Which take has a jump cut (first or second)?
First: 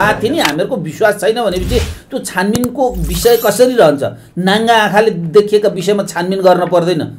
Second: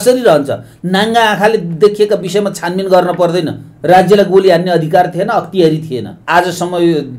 second